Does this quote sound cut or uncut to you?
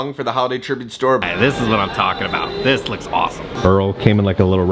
cut